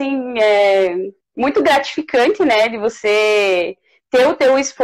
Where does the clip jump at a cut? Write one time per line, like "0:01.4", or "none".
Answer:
none